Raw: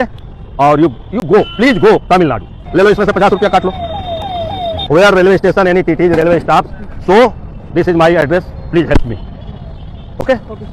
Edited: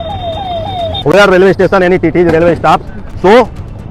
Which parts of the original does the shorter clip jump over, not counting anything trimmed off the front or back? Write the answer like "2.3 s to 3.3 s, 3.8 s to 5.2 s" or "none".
none